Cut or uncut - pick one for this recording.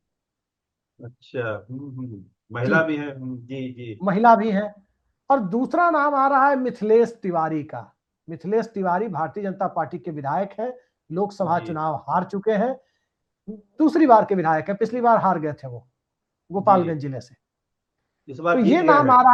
uncut